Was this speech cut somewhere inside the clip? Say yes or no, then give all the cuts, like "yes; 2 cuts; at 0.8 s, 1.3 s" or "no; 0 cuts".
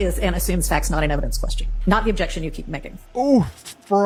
no; 0 cuts